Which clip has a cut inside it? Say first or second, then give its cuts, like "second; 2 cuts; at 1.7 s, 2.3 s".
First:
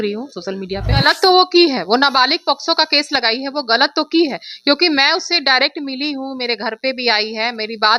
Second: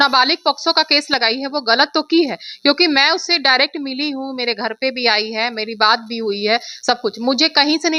first; 1 cut; at 0.9 s